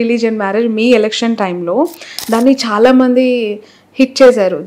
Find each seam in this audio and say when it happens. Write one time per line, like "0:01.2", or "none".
none